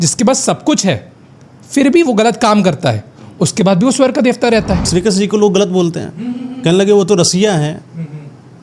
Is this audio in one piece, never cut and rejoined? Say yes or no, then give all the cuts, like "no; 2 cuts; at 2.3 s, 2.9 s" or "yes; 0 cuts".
no; 1 cut; at 4.9 s